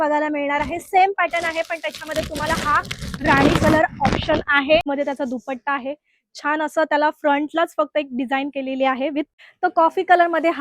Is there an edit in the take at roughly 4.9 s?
yes; 2 cuts; at 4.9 s, 9.3 s

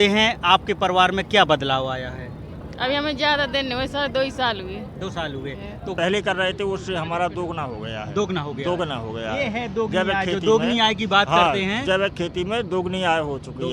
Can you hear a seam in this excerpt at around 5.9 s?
yes; 1 cut; at 5.9 s

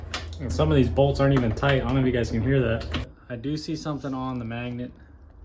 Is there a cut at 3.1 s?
yes; 1 cut; at 3.1 s

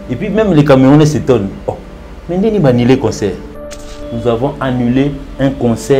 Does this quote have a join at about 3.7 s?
yes; 1 cut; at 3.7 s

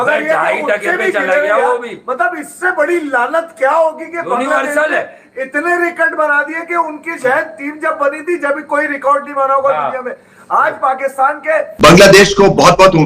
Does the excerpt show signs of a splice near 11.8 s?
yes; 1 cut; at 11.8 s

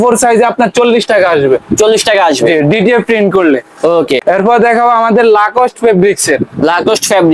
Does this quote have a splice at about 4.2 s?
yes; 1 cut; at 4.2 s

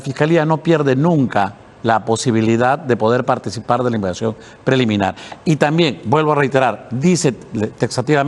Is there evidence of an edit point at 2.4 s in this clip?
no; 0 cuts

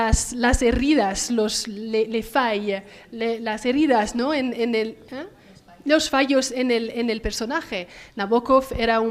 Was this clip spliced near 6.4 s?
yes; 1 cut; at 6.4 s

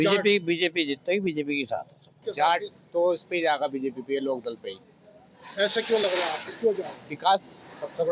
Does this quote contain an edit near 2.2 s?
yes; 1 cut; at 2.2 s

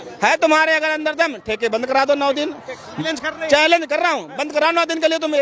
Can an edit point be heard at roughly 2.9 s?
yes; 1 cut; at 2.9 s

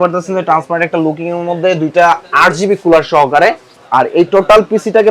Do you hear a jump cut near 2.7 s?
no; 0 cuts

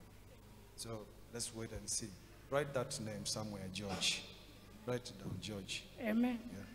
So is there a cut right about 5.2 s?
no; 1 cut; at 3.0 s

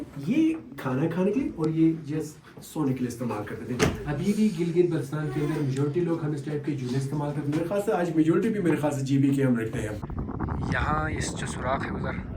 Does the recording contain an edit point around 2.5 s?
no; 1 cut; at 10.1 s

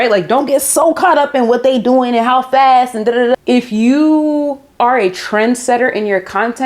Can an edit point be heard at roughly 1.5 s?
no; 1 cut; at 3.4 s

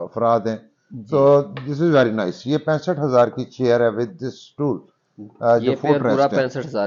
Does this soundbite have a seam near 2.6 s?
no; 0 cuts

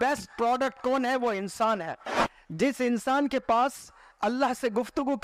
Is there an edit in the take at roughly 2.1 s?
yes; 1 cut; at 2.1 s

